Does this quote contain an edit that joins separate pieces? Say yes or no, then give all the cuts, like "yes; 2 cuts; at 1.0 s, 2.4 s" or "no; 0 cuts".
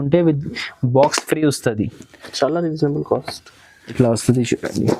yes; 1 cut; at 3.9 s